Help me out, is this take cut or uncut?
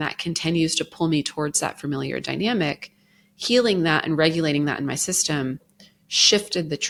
uncut